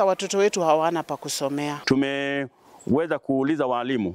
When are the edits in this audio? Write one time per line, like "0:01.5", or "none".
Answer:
0:01.8